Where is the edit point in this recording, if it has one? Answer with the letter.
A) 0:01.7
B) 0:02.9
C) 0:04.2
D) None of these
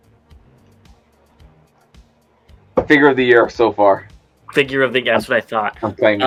D